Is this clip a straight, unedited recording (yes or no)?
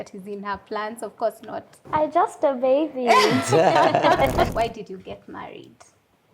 no